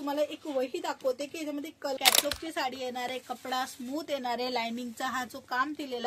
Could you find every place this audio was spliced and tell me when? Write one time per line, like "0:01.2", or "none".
0:02.0